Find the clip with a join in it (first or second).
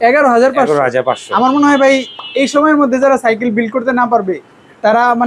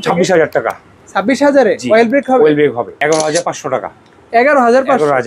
second